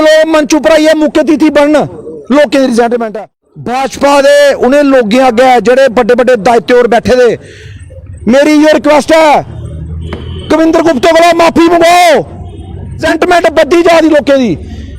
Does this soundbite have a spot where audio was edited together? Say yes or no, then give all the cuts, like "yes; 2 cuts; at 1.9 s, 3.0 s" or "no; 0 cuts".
yes; 2 cuts; at 3.1 s, 13.0 s